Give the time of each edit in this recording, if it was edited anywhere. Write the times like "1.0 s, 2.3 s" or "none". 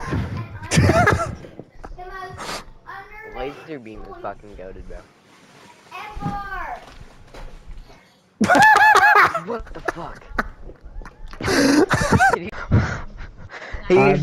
12.6 s